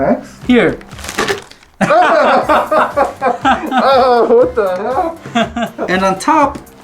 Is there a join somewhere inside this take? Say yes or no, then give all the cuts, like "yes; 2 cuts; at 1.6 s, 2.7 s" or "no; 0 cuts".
yes; 1 cut; at 5.8 s